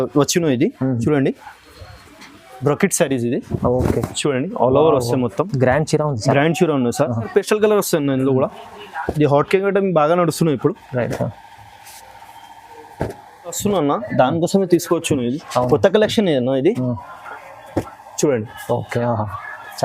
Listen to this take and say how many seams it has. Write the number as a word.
two